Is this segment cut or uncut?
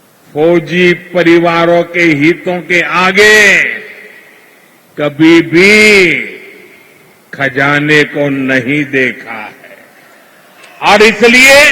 cut